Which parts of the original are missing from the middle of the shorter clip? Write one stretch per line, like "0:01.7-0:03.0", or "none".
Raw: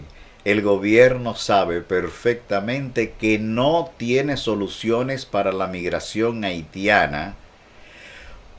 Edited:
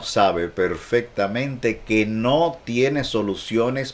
none